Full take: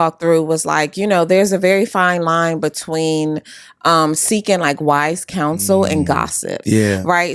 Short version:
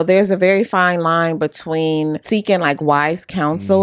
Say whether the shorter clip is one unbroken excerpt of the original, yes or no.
no